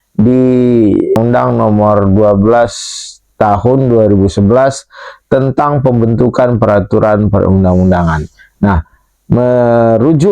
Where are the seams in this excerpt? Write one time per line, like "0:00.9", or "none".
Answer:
0:01.2